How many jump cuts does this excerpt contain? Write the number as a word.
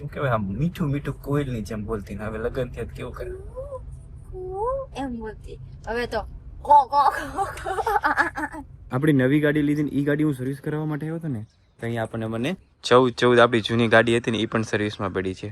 two